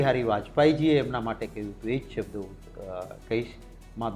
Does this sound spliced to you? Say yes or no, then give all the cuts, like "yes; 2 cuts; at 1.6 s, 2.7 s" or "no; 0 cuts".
no; 0 cuts